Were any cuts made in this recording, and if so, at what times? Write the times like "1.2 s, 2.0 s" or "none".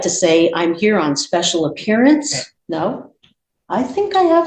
2.5 s